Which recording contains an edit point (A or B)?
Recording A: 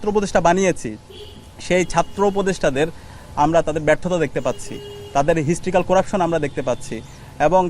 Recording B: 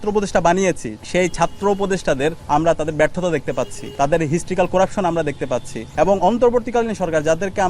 B